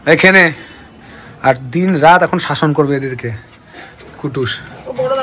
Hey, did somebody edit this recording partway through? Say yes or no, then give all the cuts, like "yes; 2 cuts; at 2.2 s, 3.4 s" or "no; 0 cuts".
no; 0 cuts